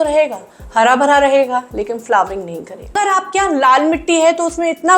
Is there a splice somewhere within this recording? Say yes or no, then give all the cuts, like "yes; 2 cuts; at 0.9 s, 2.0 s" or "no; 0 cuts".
yes; 1 cut; at 2.9 s